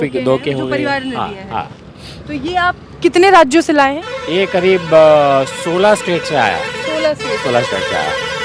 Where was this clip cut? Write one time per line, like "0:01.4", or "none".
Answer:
none

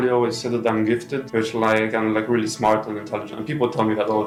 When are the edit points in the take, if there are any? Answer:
none

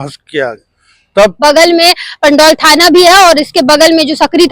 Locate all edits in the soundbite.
0:01.4

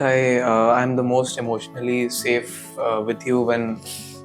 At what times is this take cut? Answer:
none

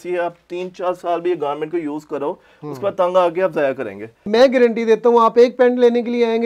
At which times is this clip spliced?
0:04.3

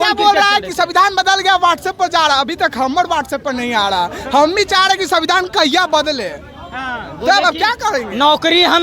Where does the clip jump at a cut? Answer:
none

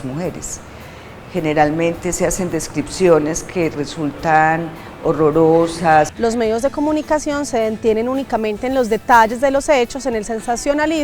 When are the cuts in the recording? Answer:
0:06.1

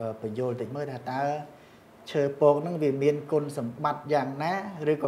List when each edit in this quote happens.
none

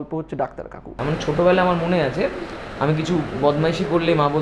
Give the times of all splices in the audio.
0:00.9

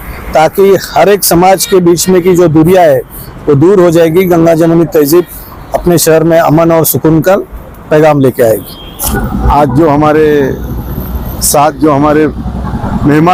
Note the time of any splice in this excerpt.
none

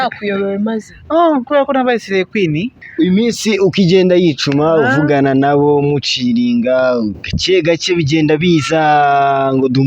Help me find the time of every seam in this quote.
0:02.7

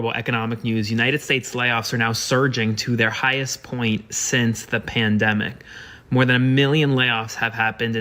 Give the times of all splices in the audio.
none

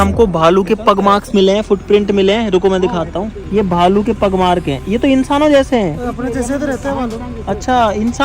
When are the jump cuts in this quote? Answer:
none

